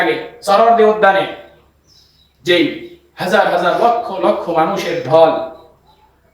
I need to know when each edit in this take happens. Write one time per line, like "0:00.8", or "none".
0:01.1